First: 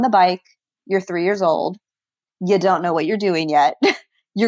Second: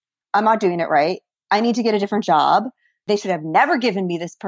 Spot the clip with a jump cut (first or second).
second